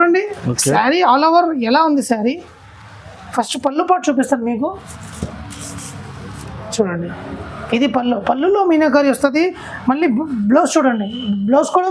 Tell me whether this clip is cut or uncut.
uncut